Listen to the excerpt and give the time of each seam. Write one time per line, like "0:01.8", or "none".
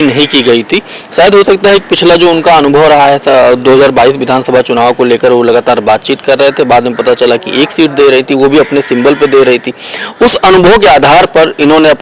none